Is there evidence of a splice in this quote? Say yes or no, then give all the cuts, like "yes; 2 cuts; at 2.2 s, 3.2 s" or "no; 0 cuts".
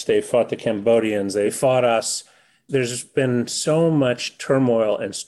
yes; 2 cuts; at 1.5 s, 2.6 s